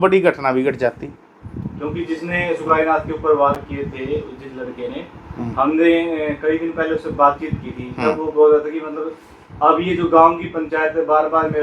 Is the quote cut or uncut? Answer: uncut